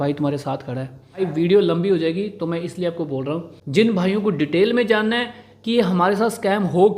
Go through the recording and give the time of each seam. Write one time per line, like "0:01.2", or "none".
0:01.2
0:03.6